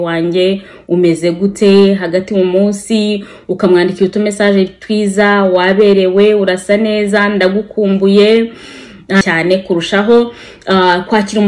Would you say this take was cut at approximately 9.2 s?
yes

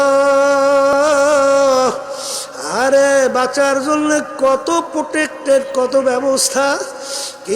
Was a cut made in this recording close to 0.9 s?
yes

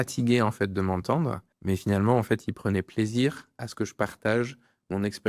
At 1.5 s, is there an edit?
yes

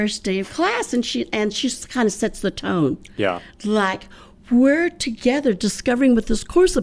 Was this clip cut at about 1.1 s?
no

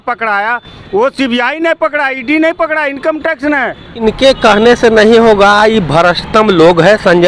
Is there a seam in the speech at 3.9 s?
yes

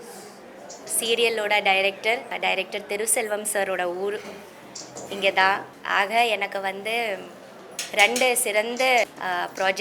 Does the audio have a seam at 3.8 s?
no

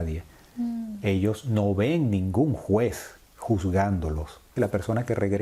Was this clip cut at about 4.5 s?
yes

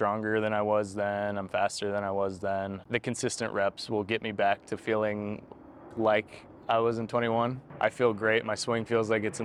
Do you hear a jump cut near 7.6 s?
yes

